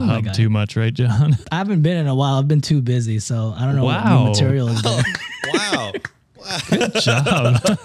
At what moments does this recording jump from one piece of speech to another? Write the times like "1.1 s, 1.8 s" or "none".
1.4 s